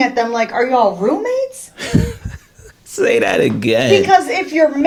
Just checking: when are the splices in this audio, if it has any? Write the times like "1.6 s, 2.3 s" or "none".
none